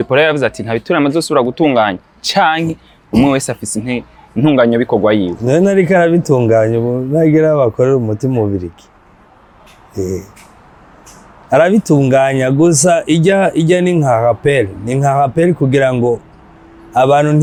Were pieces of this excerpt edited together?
no; 0 cuts

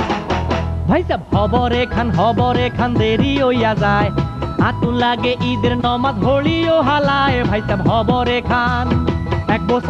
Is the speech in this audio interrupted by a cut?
no; 0 cuts

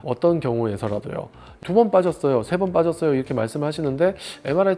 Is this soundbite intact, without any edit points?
yes; 0 cuts

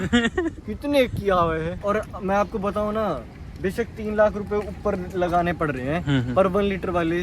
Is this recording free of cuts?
no; 1 cut; at 1.7 s

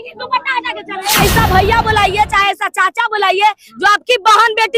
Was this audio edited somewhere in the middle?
yes; 1 cut; at 1.2 s

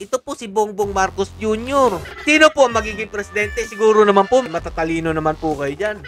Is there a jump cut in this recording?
yes; 2 cuts; at 2.1 s, 4.4 s

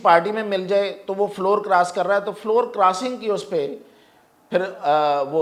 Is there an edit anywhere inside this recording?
no; 0 cuts

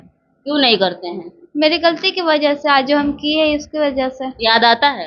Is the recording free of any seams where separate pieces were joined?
yes; 0 cuts

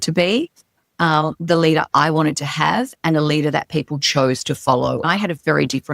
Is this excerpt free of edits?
no; 1 cut; at 5.0 s

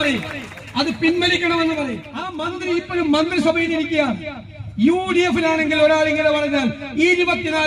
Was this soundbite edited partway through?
yes; 1 cut; at 2.4 s

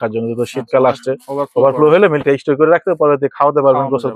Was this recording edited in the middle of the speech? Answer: no; 0 cuts

